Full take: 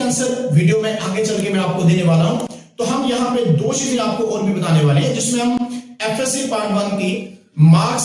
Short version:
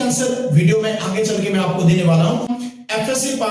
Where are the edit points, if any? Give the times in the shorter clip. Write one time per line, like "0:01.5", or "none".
0:02.6